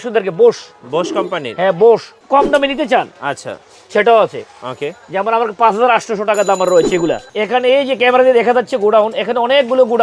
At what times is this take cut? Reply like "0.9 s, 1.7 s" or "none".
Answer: 2.1 s, 7.3 s